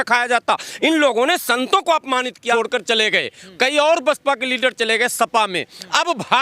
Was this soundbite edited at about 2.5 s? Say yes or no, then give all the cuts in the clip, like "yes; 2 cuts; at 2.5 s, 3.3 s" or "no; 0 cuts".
yes; 1 cut; at 2.5 s